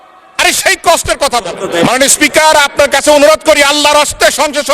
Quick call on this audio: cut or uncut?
cut